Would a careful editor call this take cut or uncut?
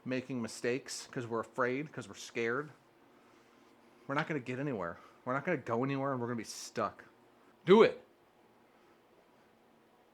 uncut